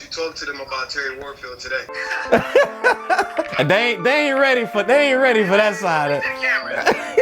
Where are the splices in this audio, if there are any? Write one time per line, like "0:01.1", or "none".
0:02.0
0:03.3